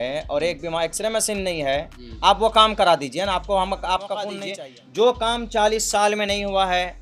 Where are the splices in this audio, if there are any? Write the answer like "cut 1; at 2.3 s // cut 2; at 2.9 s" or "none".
cut 1; at 4.4 s